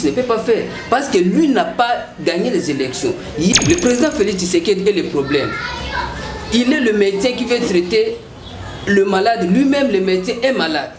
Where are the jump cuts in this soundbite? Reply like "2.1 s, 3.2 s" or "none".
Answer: 3.5 s